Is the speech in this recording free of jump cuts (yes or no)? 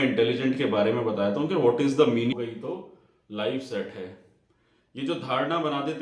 no